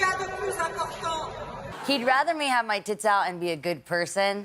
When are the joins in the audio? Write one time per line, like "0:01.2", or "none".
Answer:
0:01.6